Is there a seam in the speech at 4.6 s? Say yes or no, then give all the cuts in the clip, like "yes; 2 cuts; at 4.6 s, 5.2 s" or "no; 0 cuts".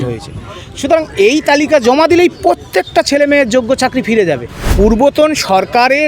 yes; 1 cut; at 4.6 s